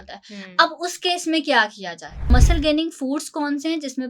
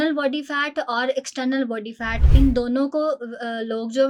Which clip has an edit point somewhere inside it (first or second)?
first